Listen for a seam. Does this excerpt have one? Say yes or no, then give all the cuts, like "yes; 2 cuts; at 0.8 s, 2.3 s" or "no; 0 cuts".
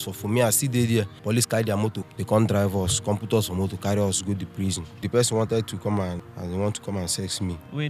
yes; 5 cuts; at 1.2 s, 2.0 s, 5.0 s, 6.2 s, 7.1 s